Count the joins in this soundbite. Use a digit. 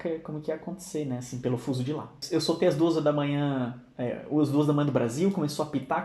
1